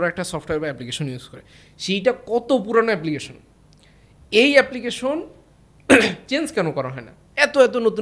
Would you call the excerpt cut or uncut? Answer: uncut